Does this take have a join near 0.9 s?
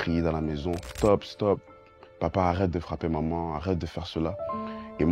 yes; 1 cut; at 0.9 s

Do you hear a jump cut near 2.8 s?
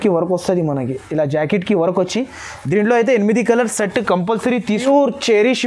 no; 1 cut; at 4.7 s

